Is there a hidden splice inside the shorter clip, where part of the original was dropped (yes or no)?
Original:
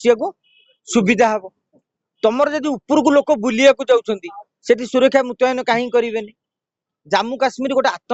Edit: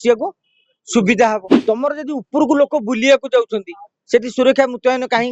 yes